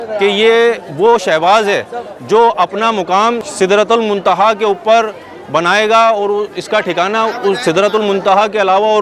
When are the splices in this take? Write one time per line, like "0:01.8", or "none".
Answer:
0:03.5